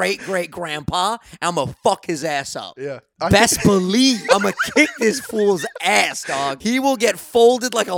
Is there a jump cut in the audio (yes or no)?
yes